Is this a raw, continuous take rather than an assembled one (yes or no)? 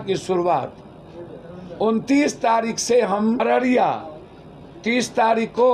no